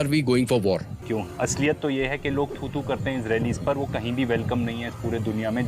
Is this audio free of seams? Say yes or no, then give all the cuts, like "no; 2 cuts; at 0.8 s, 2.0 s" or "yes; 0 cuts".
no; 1 cut; at 1.0 s